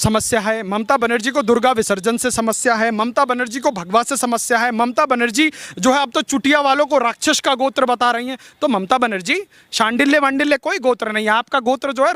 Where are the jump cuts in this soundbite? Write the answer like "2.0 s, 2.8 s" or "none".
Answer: none